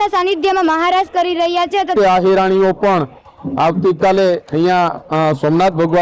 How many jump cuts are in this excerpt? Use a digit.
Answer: 1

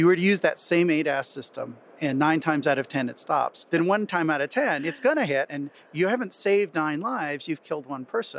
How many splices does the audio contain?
2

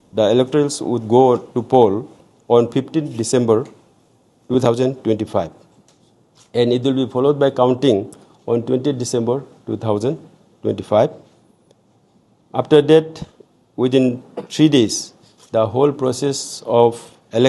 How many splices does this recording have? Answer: 0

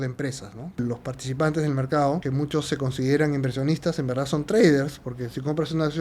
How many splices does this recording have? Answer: 2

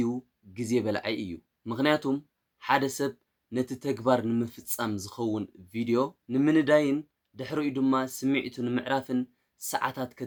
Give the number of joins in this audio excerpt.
0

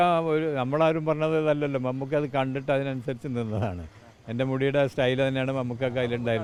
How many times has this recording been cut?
0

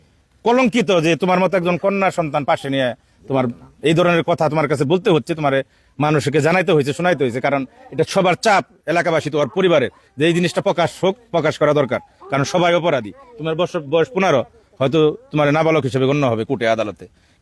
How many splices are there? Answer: 0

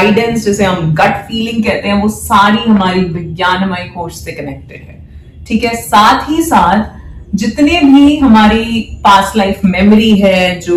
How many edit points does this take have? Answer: 0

